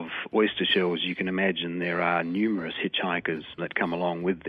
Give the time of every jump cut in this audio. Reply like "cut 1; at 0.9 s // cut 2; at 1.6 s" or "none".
cut 1; at 3.6 s